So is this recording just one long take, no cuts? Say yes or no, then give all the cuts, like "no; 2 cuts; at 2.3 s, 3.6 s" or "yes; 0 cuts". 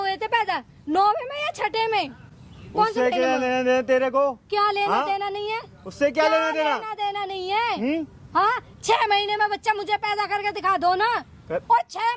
yes; 0 cuts